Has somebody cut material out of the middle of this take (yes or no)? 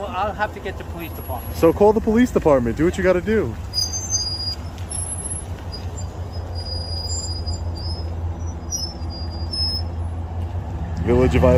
no